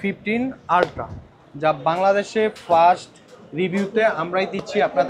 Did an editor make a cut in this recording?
no; 0 cuts

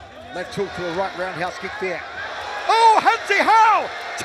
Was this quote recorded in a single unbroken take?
yes; 0 cuts

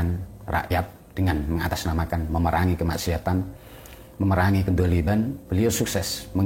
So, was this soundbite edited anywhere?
no; 0 cuts

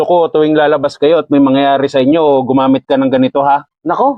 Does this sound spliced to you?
no; 0 cuts

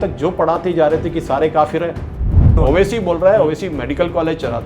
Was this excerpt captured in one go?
no; 1 cut; at 2.5 s

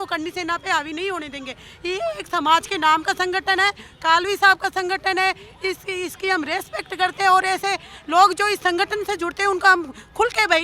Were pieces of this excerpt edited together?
no; 0 cuts

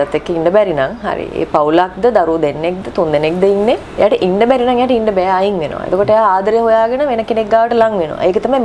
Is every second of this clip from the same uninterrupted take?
yes; 0 cuts

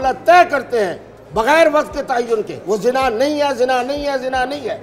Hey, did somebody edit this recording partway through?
yes; 1 cut; at 2.5 s

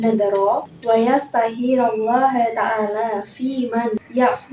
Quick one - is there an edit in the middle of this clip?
no; 0 cuts

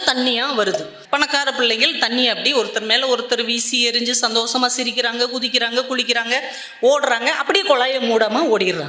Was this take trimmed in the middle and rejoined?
yes; 1 cut; at 0.9 s

